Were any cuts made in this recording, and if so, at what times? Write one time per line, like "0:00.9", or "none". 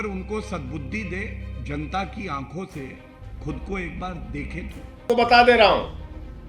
0:05.0

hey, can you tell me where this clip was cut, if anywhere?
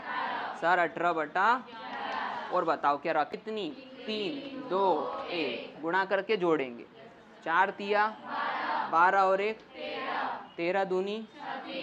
0:03.3

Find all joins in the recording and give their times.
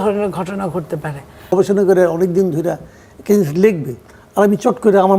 0:01.5

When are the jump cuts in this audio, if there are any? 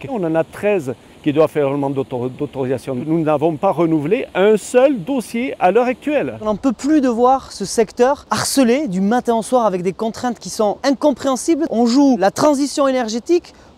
0:03.0
0:06.4
0:11.7

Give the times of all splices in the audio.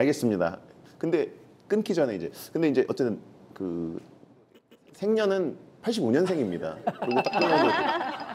0:04.6

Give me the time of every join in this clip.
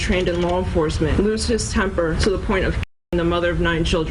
0:01.1
0:02.2

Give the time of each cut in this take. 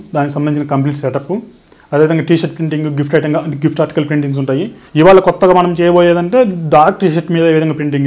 0:04.8

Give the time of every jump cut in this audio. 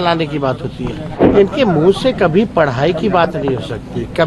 0:01.2

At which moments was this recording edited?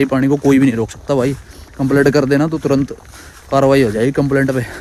none

